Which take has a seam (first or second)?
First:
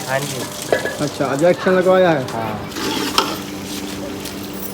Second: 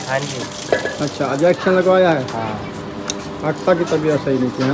first